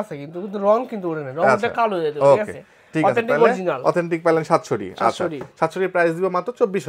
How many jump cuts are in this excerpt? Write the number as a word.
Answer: zero